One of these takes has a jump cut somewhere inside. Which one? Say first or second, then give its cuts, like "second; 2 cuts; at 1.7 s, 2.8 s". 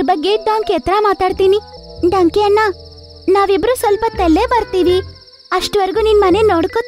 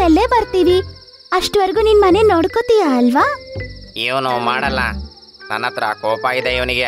first; 1 cut; at 1.8 s